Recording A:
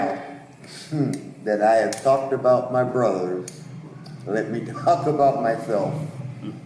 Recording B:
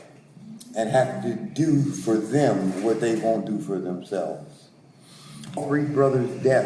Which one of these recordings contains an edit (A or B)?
B